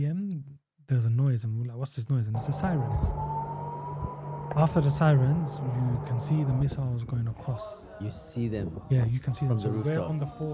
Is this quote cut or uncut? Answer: uncut